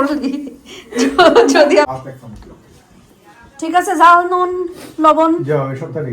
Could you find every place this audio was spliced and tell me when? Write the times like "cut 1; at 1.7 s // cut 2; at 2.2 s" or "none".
cut 1; at 1.9 s